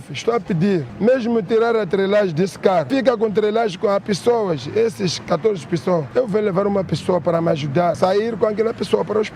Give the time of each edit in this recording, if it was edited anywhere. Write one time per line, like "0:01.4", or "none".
0:00.9
0:02.9
0:06.1
0:08.0